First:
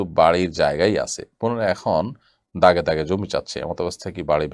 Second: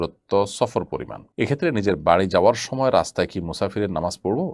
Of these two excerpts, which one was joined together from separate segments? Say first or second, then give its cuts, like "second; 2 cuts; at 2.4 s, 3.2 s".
second; 1 cut; at 1.2 s